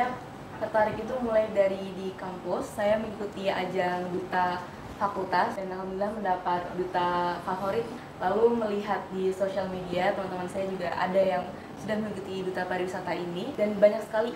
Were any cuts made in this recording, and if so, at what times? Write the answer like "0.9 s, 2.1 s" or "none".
5.6 s, 8.0 s, 13.5 s